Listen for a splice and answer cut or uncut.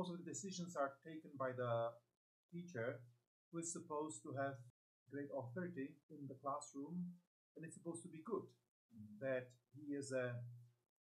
cut